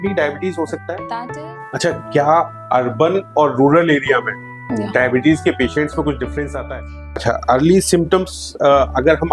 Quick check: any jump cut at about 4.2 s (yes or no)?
no